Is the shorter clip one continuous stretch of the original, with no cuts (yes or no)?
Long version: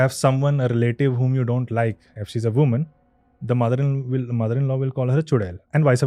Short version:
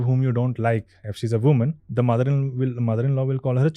no